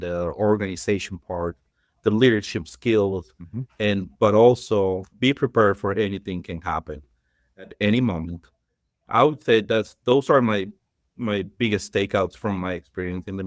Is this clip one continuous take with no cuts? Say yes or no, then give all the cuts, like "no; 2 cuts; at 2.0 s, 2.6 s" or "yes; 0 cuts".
no; 1 cut; at 5.1 s